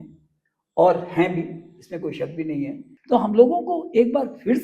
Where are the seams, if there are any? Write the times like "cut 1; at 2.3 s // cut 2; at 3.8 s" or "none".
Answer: cut 1; at 2.9 s